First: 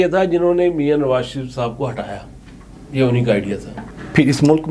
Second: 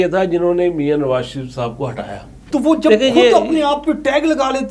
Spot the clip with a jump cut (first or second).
second